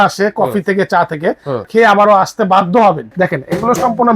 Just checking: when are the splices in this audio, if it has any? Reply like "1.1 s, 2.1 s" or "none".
3.1 s